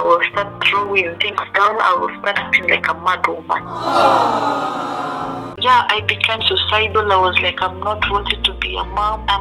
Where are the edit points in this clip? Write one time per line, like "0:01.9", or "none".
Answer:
0:05.5